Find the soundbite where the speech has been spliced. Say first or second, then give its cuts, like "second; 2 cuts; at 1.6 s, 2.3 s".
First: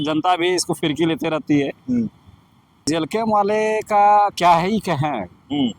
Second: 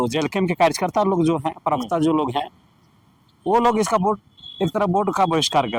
first; 1 cut; at 2.9 s